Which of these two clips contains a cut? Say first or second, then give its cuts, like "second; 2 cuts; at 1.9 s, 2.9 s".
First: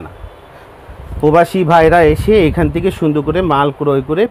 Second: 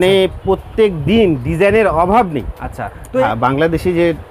second; 1 cut; at 3.2 s